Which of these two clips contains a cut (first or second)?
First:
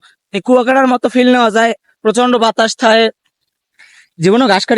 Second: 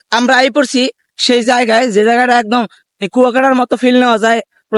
first